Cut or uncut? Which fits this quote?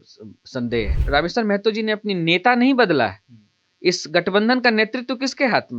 cut